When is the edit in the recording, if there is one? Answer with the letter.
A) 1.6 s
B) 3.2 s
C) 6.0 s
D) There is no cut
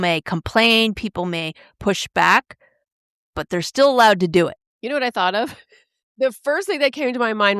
C